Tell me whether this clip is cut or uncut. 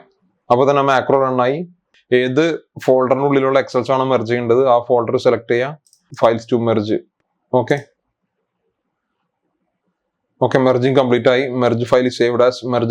cut